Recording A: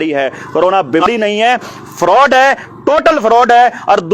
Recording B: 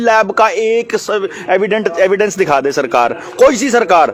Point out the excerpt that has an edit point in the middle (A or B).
A